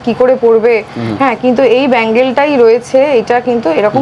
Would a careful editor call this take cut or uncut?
uncut